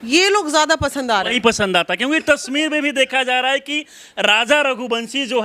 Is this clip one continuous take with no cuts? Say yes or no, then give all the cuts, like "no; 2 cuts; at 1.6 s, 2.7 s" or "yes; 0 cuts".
yes; 0 cuts